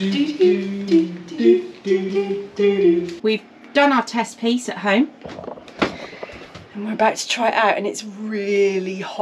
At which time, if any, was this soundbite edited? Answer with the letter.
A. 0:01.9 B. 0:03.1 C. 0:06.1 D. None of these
B